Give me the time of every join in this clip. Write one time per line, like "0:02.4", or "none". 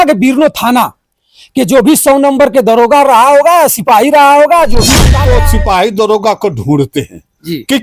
0:05.2